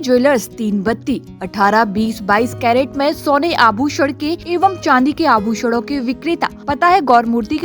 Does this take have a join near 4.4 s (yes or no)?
yes